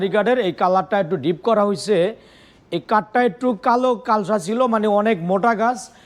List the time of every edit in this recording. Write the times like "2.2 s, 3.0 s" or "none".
none